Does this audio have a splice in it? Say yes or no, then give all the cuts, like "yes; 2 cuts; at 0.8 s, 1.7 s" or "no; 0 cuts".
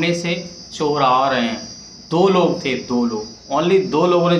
no; 0 cuts